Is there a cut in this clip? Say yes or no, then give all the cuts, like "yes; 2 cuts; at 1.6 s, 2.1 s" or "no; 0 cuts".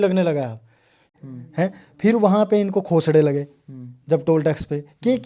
yes; 1 cut; at 1.0 s